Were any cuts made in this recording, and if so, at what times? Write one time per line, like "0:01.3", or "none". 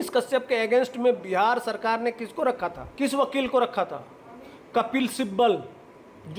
0:02.8